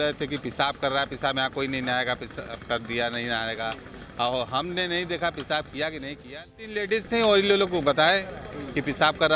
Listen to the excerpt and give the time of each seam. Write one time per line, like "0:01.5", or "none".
0:06.8